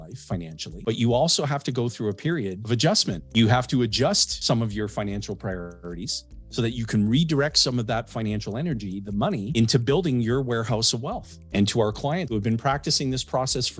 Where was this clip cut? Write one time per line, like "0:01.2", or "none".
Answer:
0:11.3